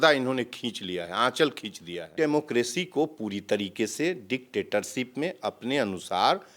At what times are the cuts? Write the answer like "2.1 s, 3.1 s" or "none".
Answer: 2.1 s